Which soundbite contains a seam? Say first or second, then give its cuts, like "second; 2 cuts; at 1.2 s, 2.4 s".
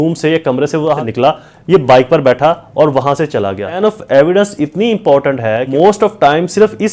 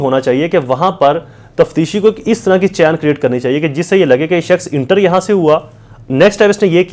first; 3 cuts; at 1.0 s, 3.8 s, 5.6 s